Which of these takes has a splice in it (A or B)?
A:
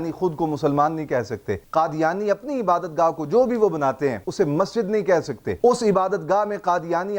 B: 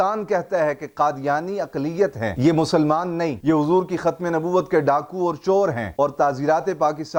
A